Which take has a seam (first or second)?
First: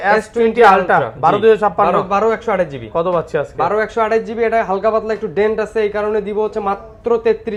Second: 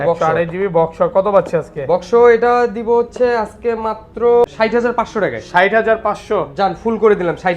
second